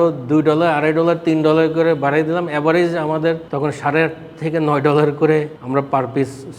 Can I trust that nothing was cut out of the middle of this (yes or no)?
no